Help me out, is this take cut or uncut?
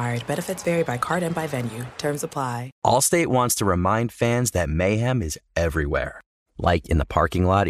cut